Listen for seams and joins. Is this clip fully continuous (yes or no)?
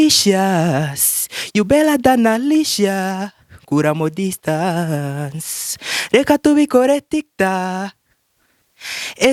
yes